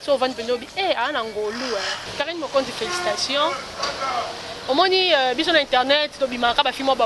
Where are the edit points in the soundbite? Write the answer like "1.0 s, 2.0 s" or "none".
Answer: 2.0 s

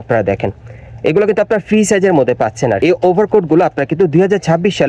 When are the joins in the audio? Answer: 2.8 s

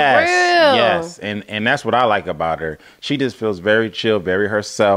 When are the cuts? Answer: none

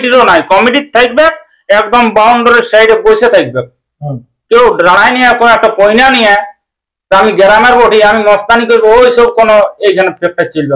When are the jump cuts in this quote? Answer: none

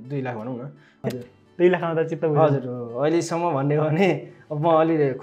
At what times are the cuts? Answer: 0.9 s

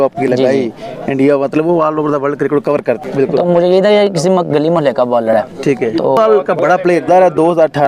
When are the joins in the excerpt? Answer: 3.0 s, 6.2 s

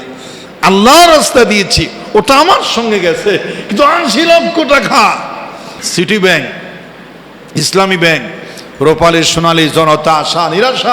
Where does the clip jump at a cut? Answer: 5.8 s

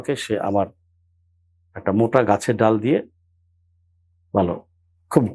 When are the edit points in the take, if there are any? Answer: none

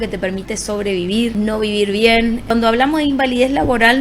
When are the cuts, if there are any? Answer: 1.3 s, 2.5 s

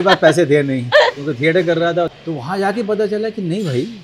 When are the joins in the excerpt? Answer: 2.1 s

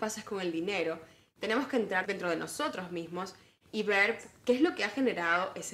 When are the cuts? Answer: 4.2 s

